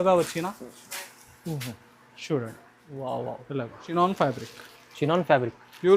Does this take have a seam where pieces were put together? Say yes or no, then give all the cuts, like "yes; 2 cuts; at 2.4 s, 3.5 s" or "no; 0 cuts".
yes; 1 cut; at 3.8 s